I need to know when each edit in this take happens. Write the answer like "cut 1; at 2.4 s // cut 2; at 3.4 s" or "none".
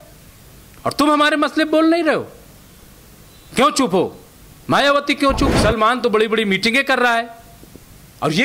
cut 1; at 5.5 s